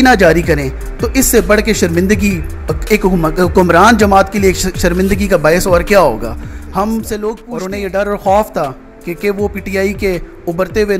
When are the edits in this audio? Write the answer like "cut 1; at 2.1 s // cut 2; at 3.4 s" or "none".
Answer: cut 1; at 7.5 s